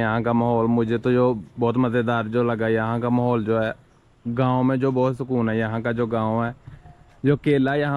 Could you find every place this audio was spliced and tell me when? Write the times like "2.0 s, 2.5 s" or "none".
none